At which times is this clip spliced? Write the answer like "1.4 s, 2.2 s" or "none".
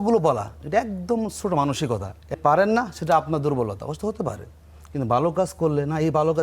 2.4 s